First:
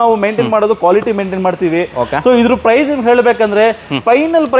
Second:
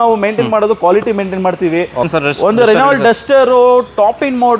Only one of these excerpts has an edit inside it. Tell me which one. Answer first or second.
second